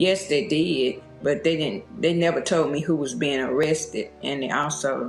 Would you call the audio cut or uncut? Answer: uncut